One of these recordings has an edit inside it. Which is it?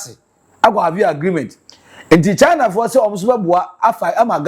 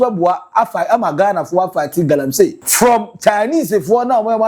second; 1 cut; at 2.6 s

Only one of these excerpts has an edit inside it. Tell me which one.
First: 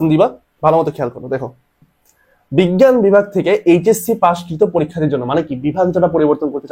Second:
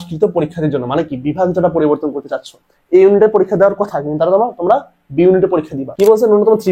second; 1 cut; at 5.8 s

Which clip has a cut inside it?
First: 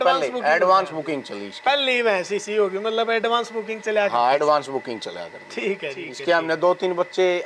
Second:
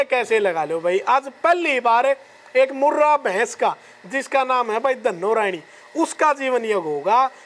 first; 1 cut; at 6.1 s

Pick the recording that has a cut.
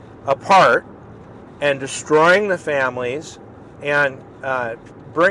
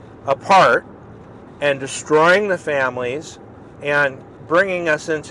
second; 1 cut; at 4.3 s

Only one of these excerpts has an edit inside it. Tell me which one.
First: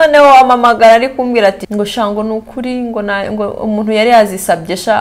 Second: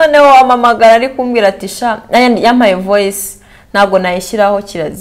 first; 1 cut; at 1.6 s

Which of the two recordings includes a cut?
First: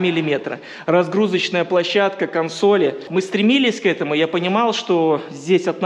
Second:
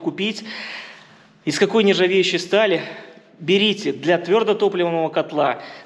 first; 1 cut; at 3.0 s

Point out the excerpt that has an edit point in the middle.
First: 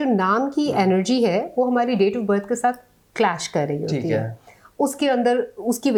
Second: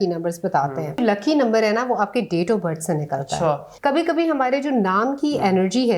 second; 2 cuts; at 1.0 s, 3.7 s

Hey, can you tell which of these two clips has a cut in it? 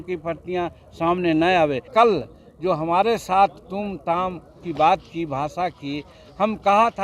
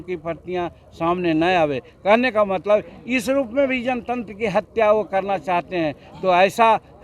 first; 1 cut; at 1.9 s

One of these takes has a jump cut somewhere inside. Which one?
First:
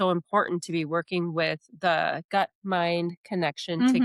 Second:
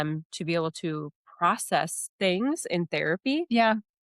second; 1 cut; at 2.0 s

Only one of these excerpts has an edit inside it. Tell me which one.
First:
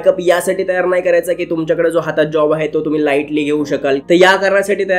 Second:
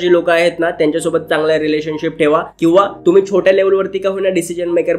first; 1 cut; at 4.0 s

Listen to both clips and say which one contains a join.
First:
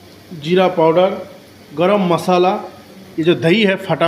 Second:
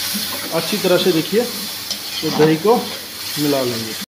first; 1 cut; at 3.0 s

